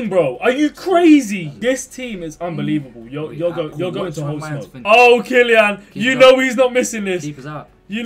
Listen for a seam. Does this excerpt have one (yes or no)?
yes